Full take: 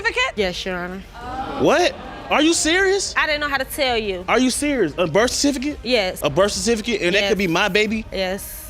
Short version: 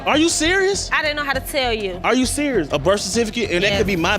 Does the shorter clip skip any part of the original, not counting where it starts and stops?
yes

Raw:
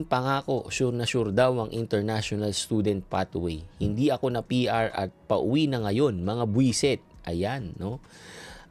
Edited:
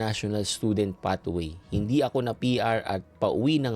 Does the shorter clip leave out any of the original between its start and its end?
no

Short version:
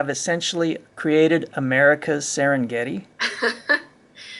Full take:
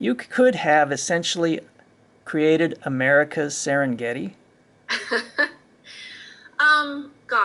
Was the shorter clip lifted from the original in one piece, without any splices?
no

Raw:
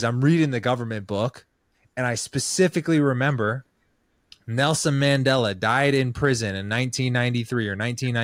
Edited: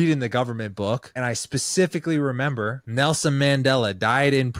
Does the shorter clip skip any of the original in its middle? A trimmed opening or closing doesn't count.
yes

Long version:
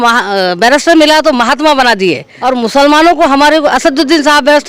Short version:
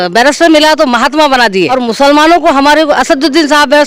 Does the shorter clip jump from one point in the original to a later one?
yes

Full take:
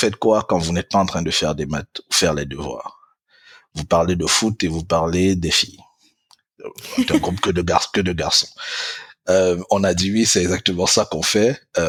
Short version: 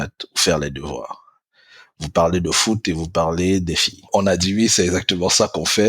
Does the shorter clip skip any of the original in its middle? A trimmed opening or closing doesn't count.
yes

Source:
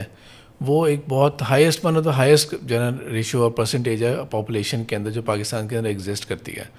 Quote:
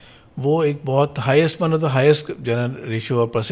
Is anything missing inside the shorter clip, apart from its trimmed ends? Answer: no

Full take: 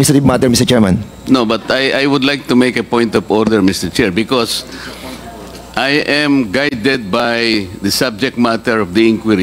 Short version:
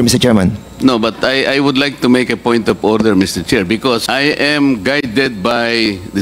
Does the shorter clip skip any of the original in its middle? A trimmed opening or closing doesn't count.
yes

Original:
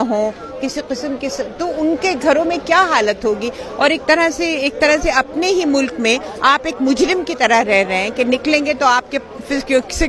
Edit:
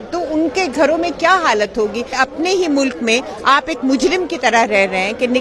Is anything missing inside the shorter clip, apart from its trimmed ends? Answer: yes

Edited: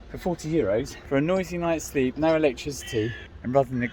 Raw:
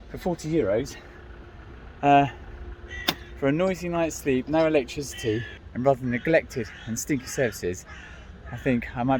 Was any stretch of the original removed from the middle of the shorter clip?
yes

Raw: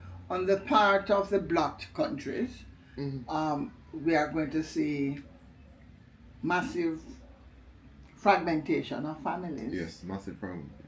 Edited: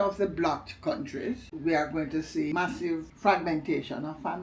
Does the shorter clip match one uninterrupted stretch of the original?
no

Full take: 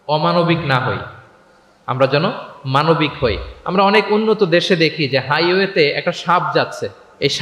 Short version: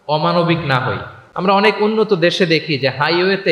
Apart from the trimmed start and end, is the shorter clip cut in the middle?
yes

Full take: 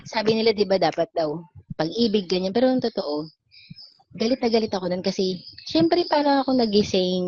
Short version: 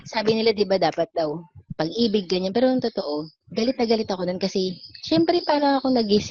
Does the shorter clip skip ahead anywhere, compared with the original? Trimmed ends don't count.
yes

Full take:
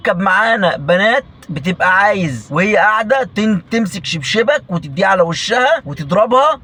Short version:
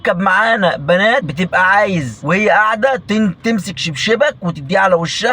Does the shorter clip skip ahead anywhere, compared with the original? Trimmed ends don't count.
yes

